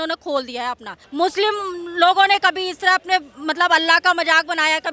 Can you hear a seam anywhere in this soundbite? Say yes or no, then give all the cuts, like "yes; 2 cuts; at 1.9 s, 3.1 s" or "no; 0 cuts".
yes; 1 cut; at 1.0 s